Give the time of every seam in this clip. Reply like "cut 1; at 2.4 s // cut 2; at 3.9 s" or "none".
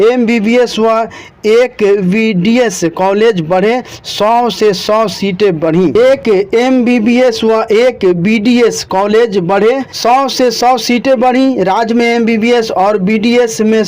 cut 1; at 5.9 s // cut 2; at 9.9 s